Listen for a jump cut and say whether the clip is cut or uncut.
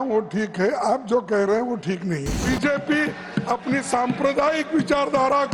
cut